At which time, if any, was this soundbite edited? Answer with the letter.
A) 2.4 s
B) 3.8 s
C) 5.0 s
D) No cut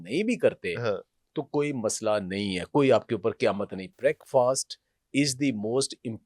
B